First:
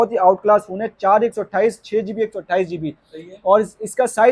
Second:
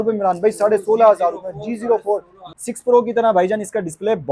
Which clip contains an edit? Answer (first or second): second